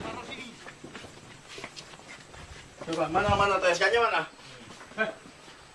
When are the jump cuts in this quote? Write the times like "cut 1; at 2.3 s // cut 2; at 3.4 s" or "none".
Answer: cut 1; at 4.8 s